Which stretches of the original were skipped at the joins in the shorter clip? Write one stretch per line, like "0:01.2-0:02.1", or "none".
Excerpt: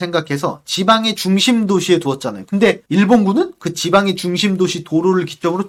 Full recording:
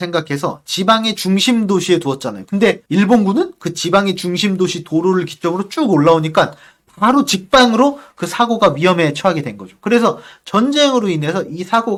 none